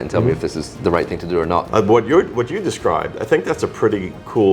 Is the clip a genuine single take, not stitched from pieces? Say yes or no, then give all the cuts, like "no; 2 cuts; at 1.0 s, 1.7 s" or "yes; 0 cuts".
no; 1 cut; at 1.7 s